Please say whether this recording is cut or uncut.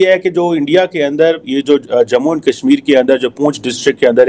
uncut